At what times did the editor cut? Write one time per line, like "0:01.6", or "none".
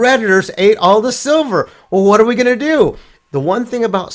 0:03.1

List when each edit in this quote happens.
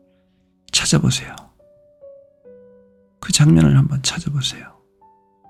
none

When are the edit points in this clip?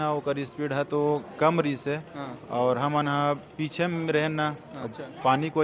none

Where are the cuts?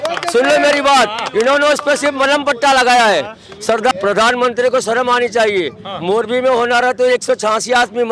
0:03.9

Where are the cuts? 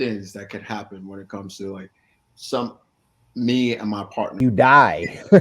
0:04.3

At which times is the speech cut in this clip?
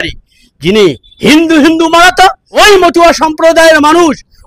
0:02.4

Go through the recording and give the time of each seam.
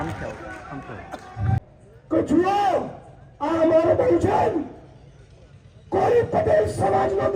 0:01.7

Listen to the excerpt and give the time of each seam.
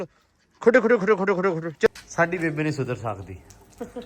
0:01.9

